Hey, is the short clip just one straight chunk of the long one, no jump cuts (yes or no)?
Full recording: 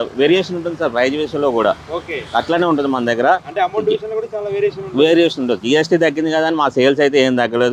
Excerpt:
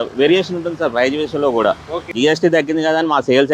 no